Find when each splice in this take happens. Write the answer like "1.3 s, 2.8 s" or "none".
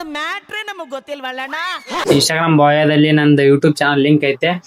1.9 s

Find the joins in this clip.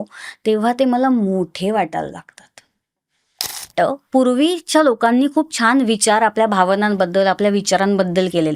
3.7 s

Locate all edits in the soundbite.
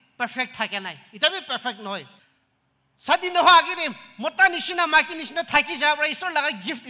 2.2 s

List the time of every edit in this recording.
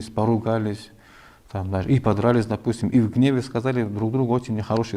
none

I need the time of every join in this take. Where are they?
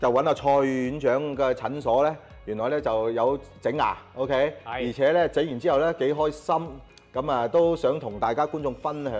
none

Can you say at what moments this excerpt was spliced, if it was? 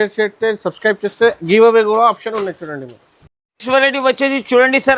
none

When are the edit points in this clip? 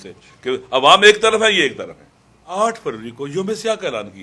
2.5 s

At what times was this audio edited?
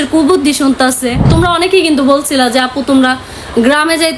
1.3 s

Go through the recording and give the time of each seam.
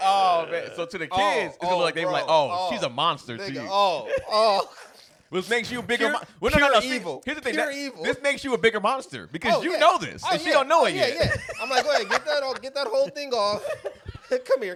none

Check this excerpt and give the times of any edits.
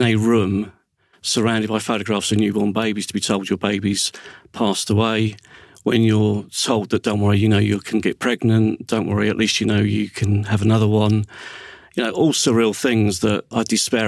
none

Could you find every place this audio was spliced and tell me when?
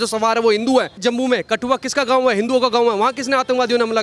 1.0 s

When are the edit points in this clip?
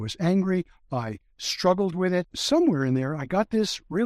2.4 s

